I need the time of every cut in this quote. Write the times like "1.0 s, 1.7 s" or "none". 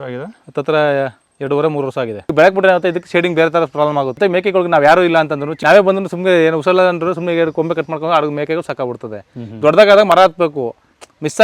2.2 s, 4.2 s, 5.5 s